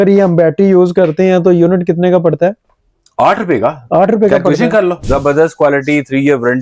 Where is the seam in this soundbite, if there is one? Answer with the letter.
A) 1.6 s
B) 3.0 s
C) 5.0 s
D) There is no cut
C